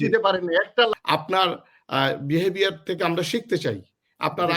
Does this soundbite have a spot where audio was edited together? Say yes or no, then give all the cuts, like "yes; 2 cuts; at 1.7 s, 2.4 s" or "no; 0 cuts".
yes; 1 cut; at 0.9 s